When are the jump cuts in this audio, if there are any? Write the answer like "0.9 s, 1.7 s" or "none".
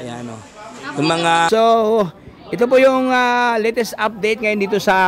1.5 s